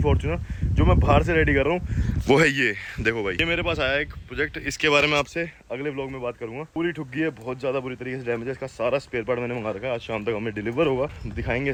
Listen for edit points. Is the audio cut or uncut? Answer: uncut